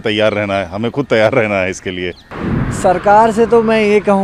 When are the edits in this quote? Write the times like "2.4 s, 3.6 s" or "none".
2.2 s